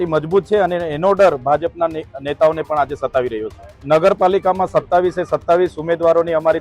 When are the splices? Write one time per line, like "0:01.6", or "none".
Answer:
0:03.7